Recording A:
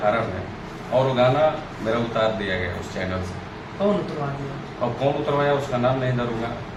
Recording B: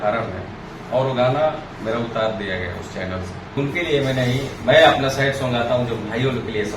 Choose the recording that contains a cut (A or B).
B